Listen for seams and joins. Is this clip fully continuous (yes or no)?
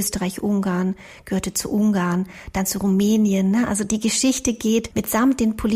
no